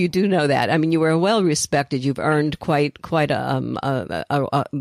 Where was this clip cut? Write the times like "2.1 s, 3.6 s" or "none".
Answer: none